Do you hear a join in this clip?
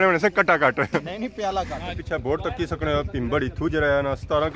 yes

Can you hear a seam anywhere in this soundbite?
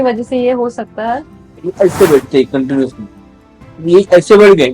yes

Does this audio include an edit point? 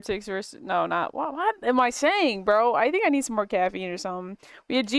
no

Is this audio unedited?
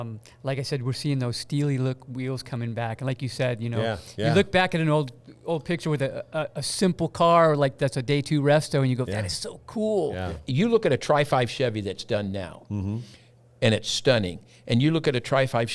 no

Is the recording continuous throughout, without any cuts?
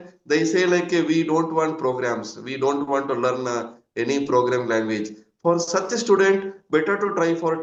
yes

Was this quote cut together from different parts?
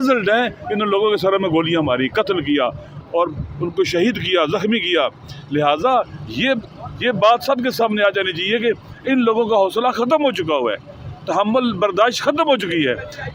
no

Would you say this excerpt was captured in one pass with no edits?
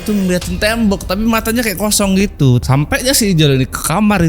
no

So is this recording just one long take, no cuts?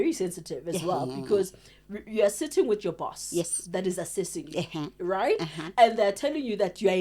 yes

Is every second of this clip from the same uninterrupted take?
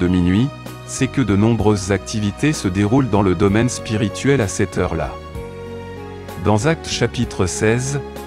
yes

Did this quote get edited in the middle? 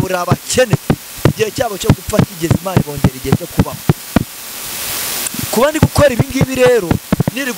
no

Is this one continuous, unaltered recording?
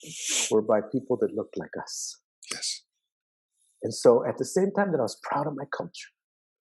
yes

